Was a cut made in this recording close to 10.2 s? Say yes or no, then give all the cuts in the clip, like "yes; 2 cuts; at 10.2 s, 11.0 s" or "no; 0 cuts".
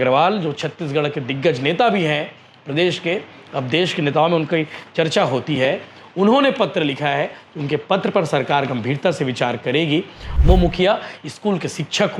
yes; 1 cut; at 10.2 s